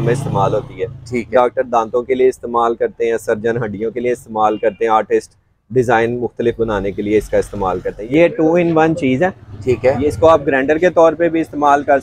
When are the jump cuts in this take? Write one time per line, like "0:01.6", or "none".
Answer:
0:07.9